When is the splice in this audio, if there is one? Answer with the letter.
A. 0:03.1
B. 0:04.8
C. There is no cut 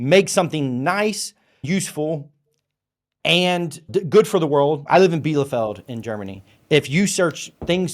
B